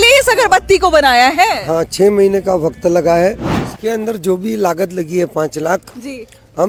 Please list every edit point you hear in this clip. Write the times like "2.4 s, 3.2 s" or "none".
none

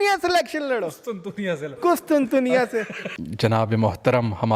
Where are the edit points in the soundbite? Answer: 3.0 s

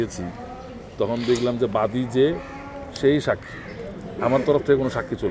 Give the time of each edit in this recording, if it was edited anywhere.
none

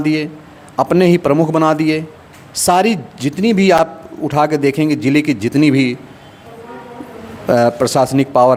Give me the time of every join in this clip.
none

